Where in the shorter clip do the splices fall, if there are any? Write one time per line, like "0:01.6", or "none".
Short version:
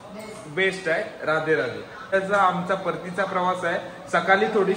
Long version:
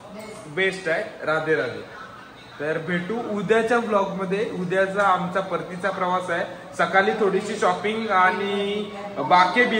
0:02.1